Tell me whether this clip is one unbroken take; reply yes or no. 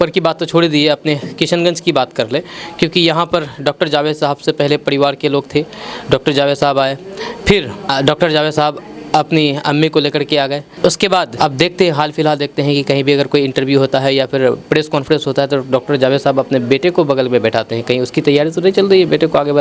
yes